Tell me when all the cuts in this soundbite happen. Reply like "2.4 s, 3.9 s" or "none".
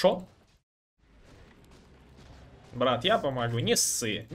1.1 s